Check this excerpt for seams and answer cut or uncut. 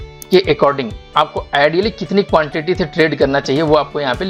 uncut